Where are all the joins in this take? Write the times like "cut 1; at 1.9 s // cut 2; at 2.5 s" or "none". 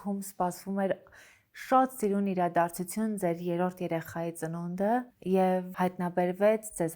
none